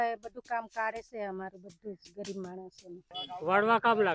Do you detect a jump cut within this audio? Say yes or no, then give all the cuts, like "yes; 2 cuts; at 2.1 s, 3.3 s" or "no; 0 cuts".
yes; 1 cut; at 3.1 s